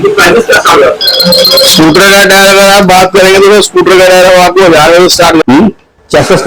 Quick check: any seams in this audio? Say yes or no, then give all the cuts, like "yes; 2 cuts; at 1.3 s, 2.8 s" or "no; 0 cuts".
yes; 1 cut; at 5.4 s